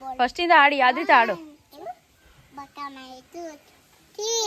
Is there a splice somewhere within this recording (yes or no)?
no